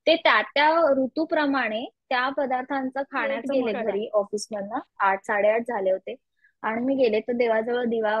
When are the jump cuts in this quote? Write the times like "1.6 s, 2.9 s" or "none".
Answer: 3.4 s